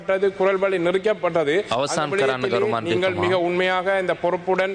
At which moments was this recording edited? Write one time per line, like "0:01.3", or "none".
none

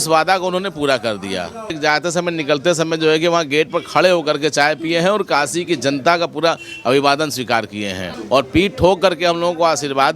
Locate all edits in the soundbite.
0:01.8
0:08.1

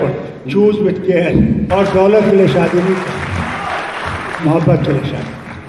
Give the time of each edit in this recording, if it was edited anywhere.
0:01.7

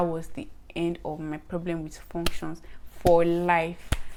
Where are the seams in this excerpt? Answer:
none

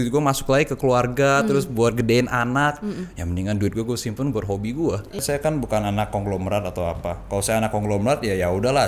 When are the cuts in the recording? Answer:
0:05.2

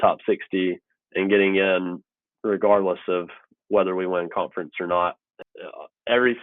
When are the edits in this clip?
0:05.3

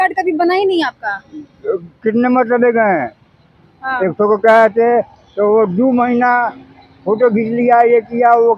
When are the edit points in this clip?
none

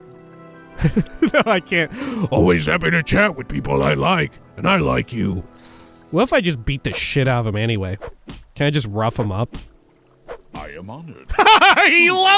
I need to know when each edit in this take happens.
0:11.2

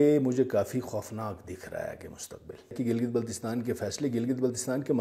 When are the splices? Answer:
0:02.8

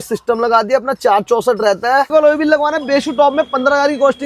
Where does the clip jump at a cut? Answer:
0:02.1

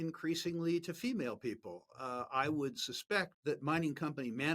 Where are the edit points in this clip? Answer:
0:03.3

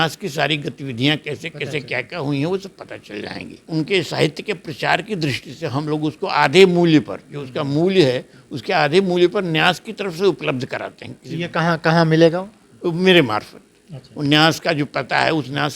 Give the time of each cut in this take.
0:03.6

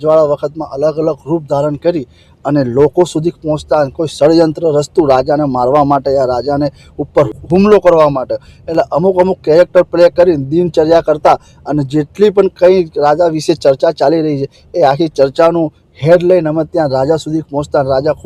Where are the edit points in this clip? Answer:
0:07.4

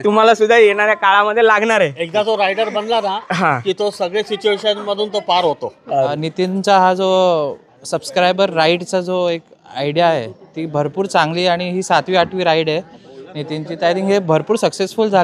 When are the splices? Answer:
0:06.2

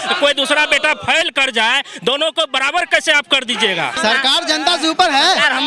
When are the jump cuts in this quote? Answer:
0:04.0

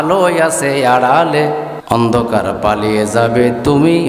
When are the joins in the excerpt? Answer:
0:01.8

